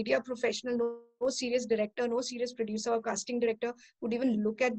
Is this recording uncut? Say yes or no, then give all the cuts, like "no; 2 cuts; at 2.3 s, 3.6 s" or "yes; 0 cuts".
yes; 0 cuts